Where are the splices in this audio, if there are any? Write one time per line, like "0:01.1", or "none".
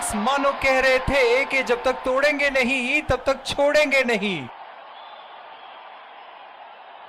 none